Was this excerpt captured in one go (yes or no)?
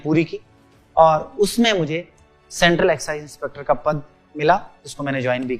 yes